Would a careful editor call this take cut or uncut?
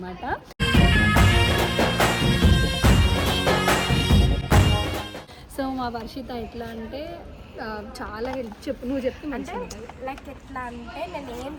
uncut